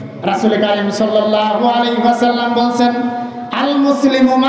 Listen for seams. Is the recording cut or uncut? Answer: uncut